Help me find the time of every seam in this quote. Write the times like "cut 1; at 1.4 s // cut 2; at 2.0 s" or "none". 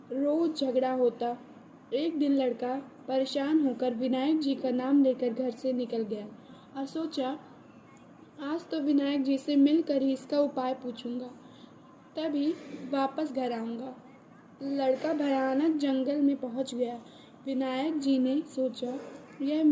none